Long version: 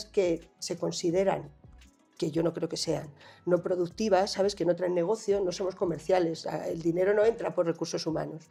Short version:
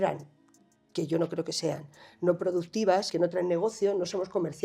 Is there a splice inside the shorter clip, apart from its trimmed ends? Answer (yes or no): yes